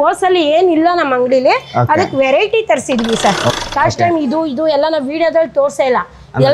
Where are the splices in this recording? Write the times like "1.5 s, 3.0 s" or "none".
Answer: 3.5 s